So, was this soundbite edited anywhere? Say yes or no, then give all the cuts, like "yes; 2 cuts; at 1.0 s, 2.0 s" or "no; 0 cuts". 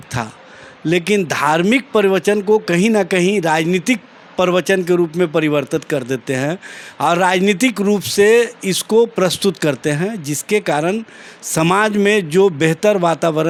no; 0 cuts